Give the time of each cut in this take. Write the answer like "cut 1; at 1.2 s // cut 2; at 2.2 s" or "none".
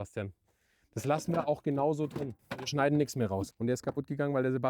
cut 1; at 2.3 s // cut 2; at 3.5 s

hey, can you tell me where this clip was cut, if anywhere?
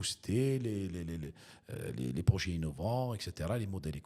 none

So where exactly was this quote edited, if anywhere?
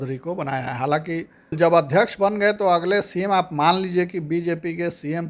cut 1; at 1.6 s

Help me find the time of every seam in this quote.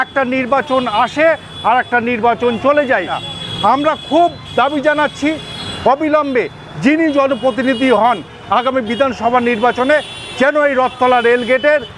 cut 1; at 3.2 s

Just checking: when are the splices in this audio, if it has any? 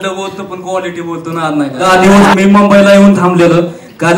cut 1; at 1.8 s

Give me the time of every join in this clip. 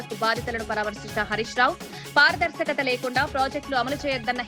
none

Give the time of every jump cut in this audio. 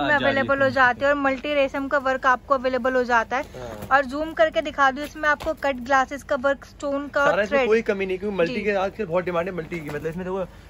none

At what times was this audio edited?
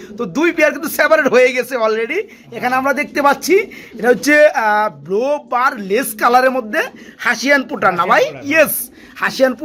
none

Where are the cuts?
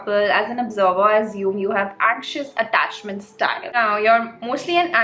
cut 1; at 3.7 s

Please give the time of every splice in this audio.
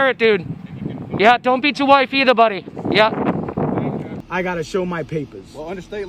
cut 1; at 4.1 s

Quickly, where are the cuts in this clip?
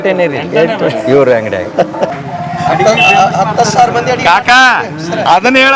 cut 1; at 2.1 s

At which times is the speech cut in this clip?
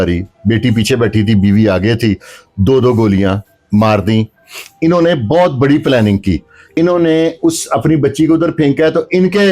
cut 1; at 6.7 s

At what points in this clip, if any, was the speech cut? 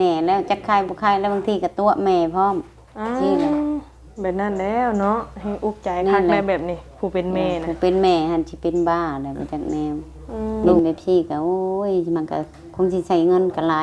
cut 1; at 10.8 s

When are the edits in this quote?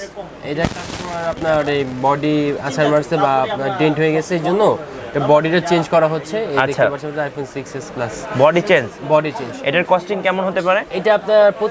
none

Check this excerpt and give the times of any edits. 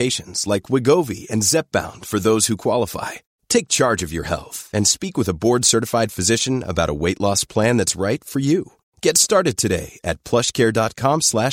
none

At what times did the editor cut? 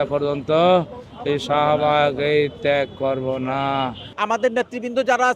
cut 1; at 4.1 s

